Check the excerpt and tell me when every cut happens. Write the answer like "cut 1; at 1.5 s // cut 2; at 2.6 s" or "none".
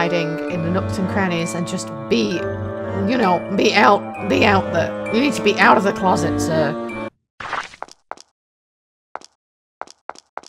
cut 1; at 7.1 s